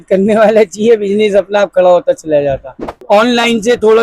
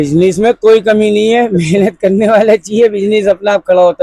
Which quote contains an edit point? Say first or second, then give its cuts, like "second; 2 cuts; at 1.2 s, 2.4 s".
first; 1 cut; at 3.0 s